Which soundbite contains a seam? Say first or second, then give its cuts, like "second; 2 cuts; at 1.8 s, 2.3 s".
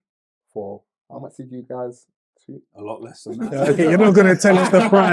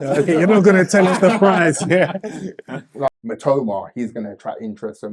second; 1 cut; at 3.2 s